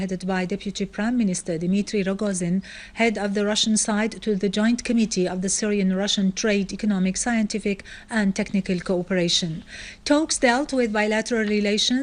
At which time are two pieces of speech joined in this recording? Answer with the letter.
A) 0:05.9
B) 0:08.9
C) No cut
A